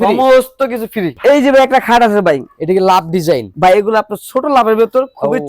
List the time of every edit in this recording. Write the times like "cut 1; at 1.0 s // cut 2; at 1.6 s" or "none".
cut 1; at 1.1 s